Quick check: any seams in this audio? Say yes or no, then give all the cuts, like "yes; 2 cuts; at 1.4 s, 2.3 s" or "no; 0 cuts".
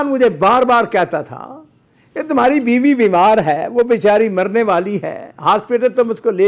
no; 0 cuts